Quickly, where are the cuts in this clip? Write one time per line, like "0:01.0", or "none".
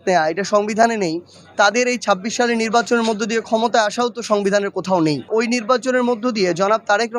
0:05.3